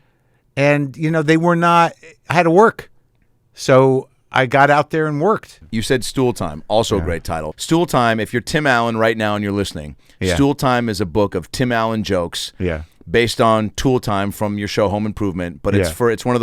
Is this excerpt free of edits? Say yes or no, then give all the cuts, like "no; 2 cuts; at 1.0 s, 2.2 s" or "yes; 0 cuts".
no; 2 cuts; at 5.6 s, 7.5 s